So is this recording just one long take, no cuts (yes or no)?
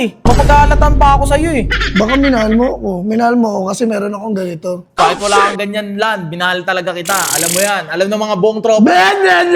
yes